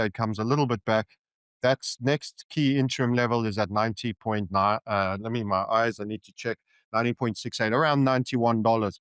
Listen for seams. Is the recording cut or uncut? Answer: uncut